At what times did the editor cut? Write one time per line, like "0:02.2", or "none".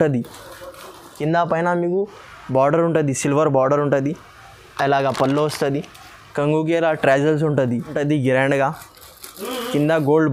0:01.0
0:08.0